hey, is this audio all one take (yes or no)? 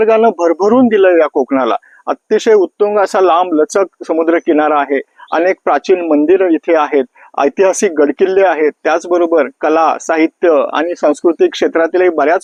yes